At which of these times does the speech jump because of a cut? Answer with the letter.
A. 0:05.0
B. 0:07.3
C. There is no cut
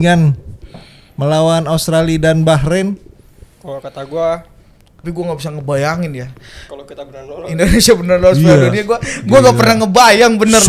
A